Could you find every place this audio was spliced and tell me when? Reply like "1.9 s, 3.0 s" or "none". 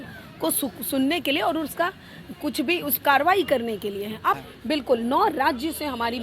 4.4 s